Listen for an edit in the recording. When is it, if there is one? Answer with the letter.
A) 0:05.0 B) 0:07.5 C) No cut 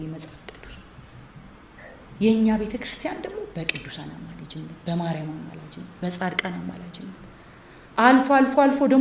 C